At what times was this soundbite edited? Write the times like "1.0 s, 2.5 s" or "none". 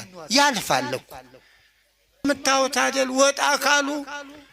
2.2 s